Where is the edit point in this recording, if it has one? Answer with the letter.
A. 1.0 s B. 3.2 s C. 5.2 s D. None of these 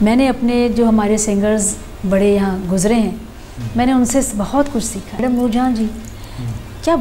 C